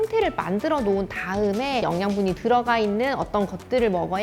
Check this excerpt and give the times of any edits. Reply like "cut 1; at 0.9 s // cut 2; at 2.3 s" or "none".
cut 1; at 1.8 s